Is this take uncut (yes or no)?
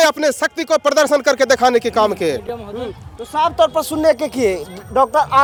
yes